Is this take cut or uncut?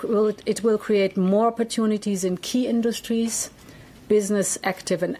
uncut